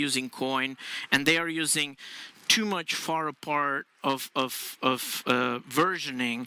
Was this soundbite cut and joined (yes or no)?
no